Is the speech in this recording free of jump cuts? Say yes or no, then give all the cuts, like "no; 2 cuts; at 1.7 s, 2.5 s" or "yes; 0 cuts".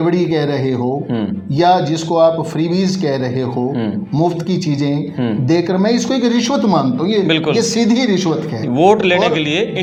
yes; 0 cuts